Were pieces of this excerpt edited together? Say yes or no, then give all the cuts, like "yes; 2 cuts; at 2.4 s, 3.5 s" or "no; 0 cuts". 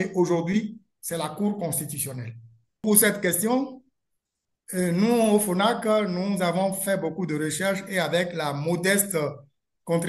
yes; 1 cut; at 2.8 s